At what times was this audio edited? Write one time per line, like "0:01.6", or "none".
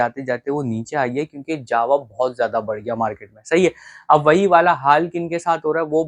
none